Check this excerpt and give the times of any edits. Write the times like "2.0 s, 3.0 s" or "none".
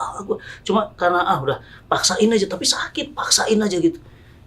1.7 s